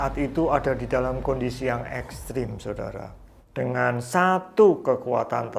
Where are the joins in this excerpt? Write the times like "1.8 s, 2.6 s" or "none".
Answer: 3.2 s